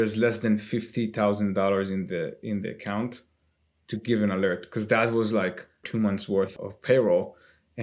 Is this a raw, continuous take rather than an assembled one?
no; 2 cuts; at 5.8 s, 6.5 s

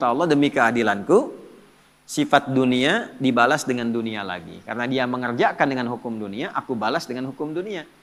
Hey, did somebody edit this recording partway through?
no; 0 cuts

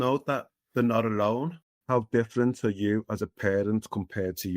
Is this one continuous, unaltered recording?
no; 1 cut; at 1.7 s

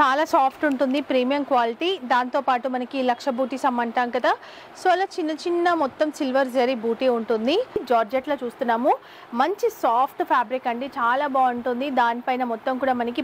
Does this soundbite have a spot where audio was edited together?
yes; 1 cut; at 7.8 s

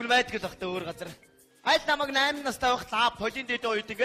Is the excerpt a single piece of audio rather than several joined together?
yes; 0 cuts

